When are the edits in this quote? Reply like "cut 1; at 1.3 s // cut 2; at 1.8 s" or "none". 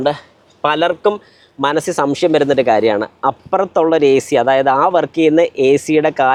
none